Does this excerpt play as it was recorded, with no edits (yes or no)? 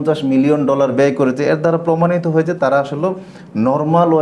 yes